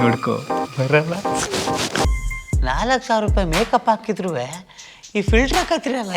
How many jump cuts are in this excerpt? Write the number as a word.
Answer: one